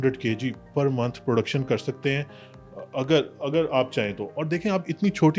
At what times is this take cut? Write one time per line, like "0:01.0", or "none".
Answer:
none